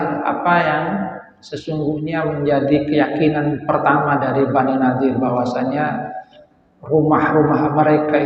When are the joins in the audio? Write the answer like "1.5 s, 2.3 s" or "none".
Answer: none